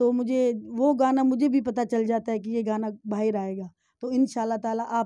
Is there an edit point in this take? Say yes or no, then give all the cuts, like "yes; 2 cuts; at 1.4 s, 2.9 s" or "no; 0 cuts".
no; 0 cuts